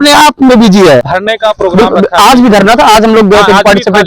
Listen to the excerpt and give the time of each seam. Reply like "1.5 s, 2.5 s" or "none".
1.0 s